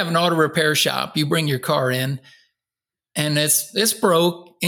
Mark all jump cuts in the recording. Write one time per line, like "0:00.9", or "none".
none